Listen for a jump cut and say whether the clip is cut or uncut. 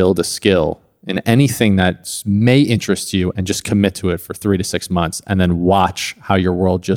uncut